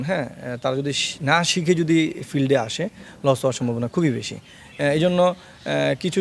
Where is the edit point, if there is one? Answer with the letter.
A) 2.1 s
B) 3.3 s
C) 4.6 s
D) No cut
D